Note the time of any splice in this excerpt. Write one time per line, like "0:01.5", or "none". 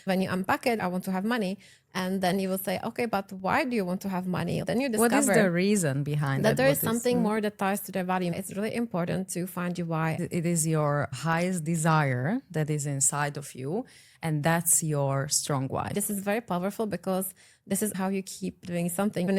0:08.3
0:10.2
0:15.9

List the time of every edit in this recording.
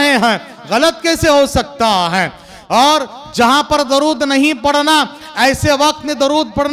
none

